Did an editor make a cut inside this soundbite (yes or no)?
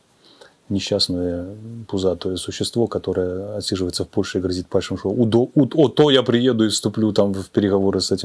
no